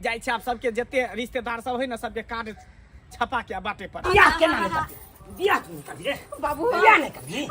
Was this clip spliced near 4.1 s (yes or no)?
yes